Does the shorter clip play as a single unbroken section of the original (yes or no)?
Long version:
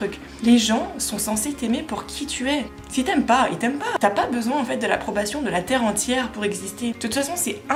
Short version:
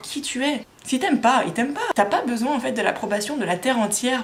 yes